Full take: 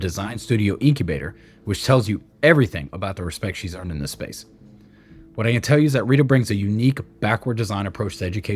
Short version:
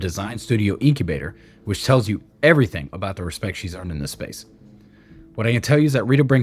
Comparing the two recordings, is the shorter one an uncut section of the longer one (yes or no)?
yes